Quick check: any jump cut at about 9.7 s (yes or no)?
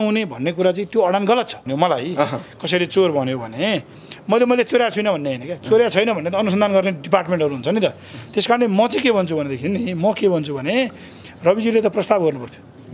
no